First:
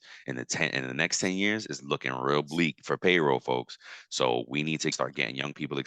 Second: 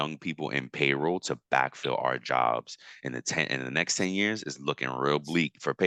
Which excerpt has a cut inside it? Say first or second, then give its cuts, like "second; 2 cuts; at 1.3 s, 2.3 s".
first; 1 cut; at 4.9 s